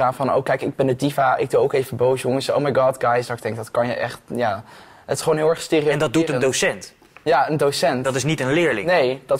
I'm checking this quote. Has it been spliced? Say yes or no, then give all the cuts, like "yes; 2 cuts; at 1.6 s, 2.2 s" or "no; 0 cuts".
no; 0 cuts